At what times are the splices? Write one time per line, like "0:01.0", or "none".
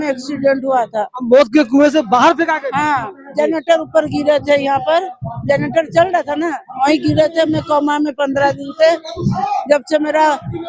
none